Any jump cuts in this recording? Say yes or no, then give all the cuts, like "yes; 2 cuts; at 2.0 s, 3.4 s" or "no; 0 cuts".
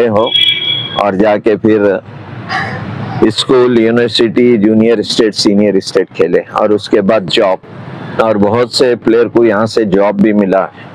no; 0 cuts